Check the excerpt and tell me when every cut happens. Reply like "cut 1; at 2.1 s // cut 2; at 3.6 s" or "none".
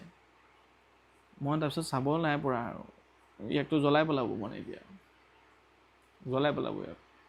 none

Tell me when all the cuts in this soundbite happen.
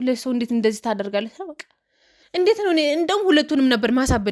cut 1; at 2.1 s

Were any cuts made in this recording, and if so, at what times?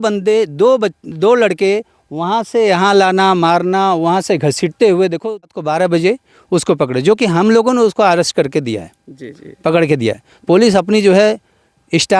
cut 1; at 5.6 s

